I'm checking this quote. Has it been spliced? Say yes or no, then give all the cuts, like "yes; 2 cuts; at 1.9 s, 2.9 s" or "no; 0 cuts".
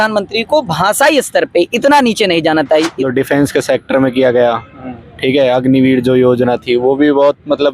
yes; 1 cut; at 2.9 s